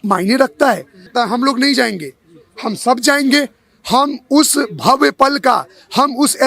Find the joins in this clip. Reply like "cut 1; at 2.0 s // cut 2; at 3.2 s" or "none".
cut 1; at 1.1 s

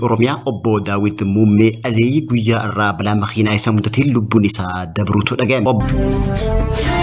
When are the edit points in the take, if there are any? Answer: cut 1; at 5.8 s

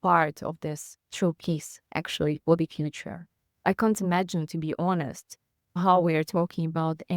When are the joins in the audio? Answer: cut 1; at 3.6 s

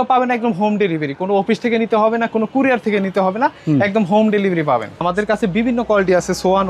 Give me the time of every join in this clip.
cut 1; at 5.0 s

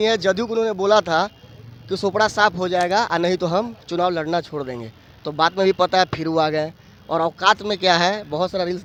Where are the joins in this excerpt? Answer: none

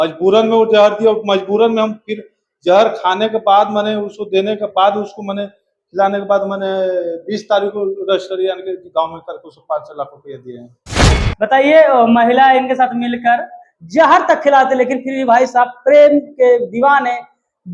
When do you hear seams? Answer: cut 1; at 11.1 s

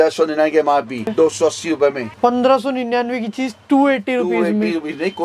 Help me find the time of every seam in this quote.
cut 1; at 1.1 s // cut 2; at 2.1 s

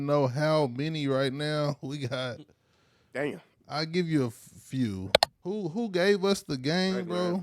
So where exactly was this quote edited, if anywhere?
cut 1; at 5.3 s

